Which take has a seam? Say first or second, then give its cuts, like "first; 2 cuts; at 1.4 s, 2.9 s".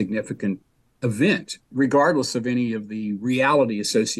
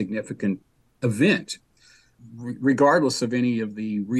first; 1 cut; at 1.6 s